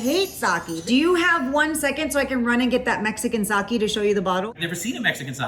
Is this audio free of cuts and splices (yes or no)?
yes